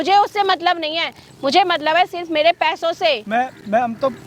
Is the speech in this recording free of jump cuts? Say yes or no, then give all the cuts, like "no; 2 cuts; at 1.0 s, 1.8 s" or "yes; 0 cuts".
yes; 0 cuts